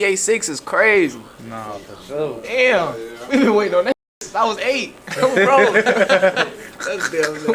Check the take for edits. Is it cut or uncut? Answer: uncut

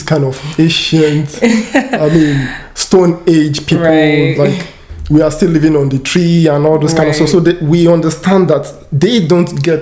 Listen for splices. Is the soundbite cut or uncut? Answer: uncut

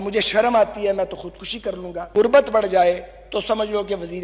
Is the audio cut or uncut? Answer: cut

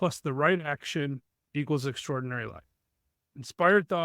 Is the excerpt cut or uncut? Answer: uncut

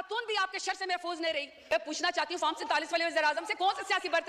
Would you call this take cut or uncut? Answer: cut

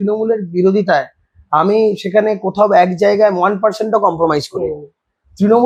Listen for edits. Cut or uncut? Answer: uncut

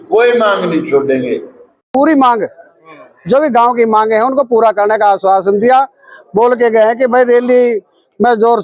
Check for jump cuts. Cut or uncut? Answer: cut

